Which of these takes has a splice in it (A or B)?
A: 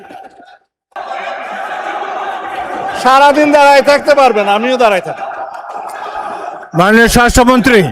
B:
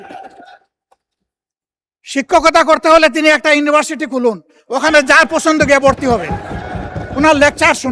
A